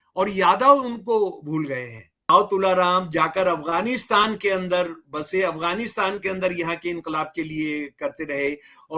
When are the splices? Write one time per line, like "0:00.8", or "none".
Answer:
0:02.3